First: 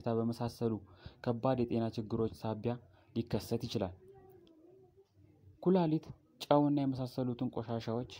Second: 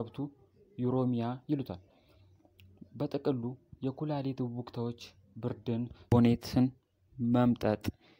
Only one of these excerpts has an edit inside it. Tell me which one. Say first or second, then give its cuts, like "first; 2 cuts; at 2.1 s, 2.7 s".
second; 1 cut; at 6.1 s